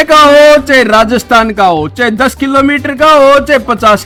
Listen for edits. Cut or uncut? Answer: uncut